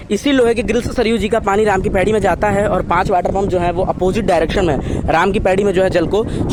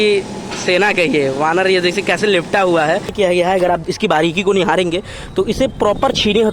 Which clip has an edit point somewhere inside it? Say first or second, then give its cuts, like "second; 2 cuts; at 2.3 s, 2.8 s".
second; 1 cut; at 3.1 s